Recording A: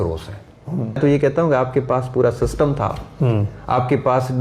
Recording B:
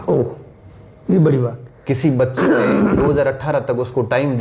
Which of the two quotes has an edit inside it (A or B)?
A